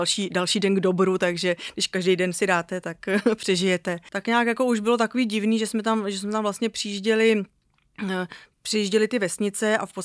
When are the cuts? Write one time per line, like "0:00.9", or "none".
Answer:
0:04.0